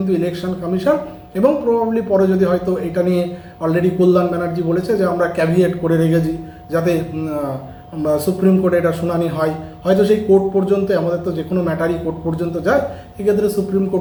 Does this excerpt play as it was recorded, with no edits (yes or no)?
yes